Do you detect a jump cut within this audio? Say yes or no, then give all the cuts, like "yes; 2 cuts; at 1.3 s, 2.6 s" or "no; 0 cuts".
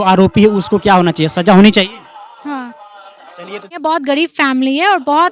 yes; 1 cut; at 3.6 s